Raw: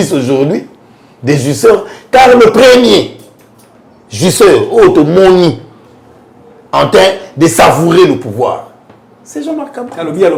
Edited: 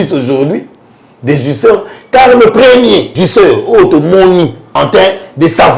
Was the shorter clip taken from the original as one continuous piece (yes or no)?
no